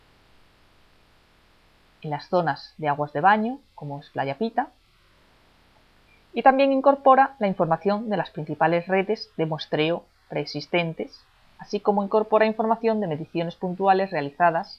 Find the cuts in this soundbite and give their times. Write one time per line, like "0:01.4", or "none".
0:02.1